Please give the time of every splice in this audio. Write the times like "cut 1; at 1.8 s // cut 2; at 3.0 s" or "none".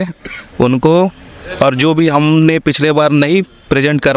none